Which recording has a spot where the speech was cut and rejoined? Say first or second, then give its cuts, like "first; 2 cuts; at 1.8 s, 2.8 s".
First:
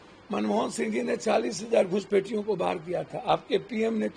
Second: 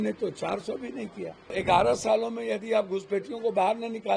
second; 1 cut; at 1.5 s